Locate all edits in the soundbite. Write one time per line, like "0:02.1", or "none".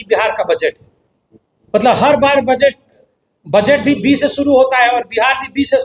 none

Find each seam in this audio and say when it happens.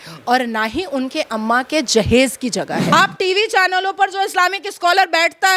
0:02.9

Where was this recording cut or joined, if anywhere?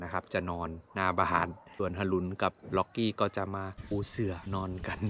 0:01.6
0:04.2

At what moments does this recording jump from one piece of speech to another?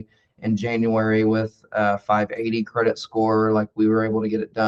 none

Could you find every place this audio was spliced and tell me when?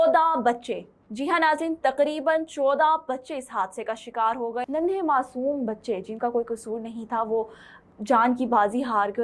0:04.7

